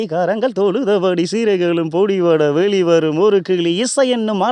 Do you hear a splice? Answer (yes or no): no